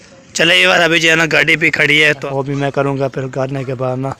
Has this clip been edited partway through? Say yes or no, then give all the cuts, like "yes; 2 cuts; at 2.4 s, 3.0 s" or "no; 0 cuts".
yes; 1 cut; at 2.3 s